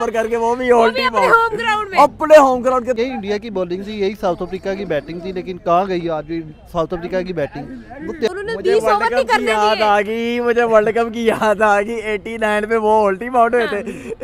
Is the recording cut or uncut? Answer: cut